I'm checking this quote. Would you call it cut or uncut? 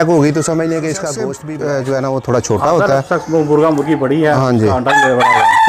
cut